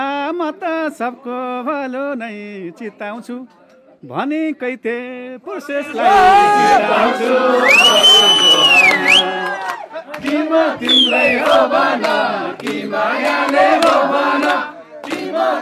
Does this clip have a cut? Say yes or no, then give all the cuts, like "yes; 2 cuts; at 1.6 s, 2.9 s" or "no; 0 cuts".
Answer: no; 0 cuts